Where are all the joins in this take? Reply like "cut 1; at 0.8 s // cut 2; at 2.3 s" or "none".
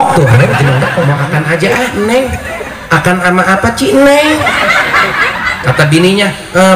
cut 1; at 1.1 s